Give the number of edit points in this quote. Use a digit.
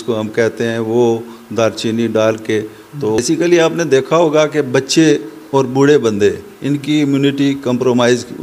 1